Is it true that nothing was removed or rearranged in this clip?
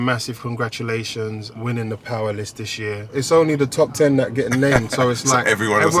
no; 1 cut; at 3.2 s

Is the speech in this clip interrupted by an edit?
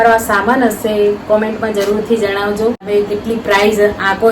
yes; 1 cut; at 2.9 s

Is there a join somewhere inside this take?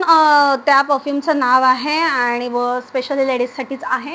no; 0 cuts

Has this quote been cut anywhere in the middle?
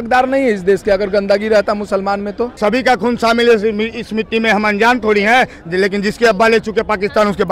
yes; 1 cut; at 2.6 s

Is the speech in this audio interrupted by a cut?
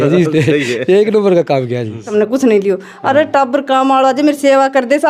yes; 1 cut; at 2.1 s

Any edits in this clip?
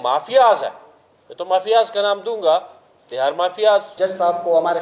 yes; 1 cut; at 3.9 s

